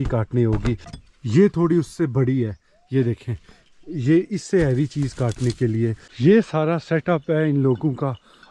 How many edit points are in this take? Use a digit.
2